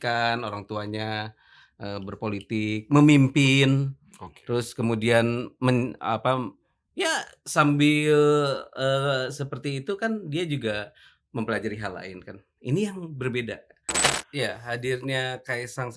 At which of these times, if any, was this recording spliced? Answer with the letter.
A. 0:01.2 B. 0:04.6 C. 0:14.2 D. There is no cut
C